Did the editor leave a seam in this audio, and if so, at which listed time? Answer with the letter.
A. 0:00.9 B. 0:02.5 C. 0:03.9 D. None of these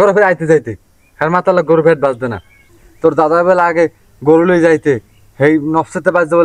B